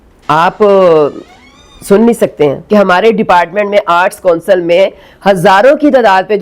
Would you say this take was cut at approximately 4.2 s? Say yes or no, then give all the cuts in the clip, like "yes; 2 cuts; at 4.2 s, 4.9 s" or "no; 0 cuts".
no; 1 cut; at 2.6 s